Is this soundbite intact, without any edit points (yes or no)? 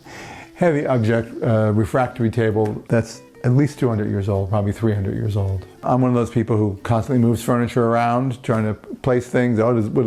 no